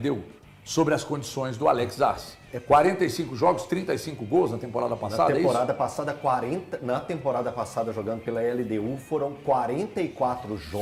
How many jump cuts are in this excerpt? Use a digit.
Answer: 0